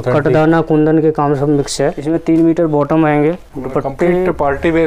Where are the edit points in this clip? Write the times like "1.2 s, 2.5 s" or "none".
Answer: 2.0 s, 3.5 s